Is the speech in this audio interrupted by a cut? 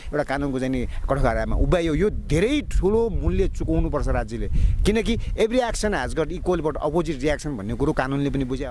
no; 0 cuts

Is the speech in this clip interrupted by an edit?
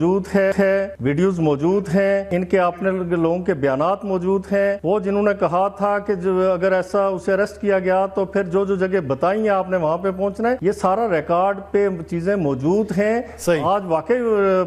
yes; 4 cuts; at 0.9 s, 2.3 s, 4.8 s, 10.6 s

